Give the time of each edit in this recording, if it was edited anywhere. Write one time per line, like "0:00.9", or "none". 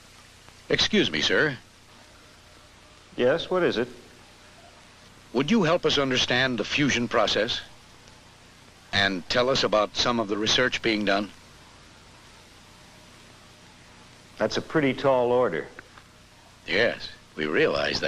0:01.7